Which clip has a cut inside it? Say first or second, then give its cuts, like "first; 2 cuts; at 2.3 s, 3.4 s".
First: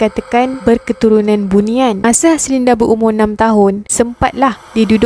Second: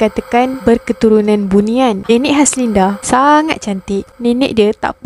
second; 2 cuts; at 2.0 s, 4.0 s